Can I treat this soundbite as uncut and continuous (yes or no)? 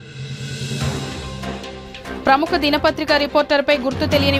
no